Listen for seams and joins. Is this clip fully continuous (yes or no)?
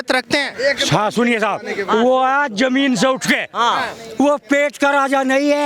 yes